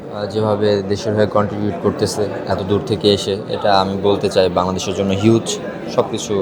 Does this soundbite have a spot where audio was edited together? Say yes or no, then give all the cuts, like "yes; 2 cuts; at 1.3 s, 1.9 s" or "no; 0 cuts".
no; 0 cuts